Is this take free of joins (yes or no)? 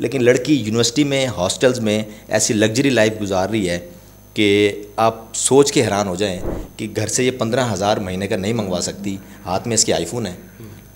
yes